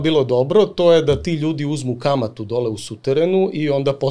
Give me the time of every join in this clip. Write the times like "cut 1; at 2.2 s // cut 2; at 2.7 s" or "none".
none